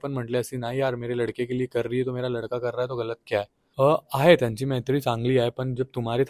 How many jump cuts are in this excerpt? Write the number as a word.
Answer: one